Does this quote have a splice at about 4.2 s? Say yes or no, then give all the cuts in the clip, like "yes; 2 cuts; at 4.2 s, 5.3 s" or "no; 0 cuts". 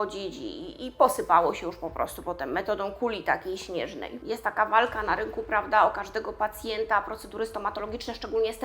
yes; 1 cut; at 4.2 s